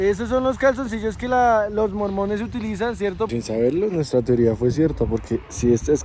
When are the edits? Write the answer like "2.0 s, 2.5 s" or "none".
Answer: 3.3 s